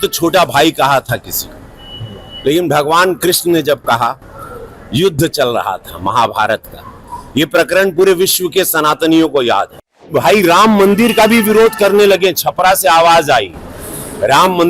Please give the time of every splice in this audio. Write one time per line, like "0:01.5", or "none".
0:10.1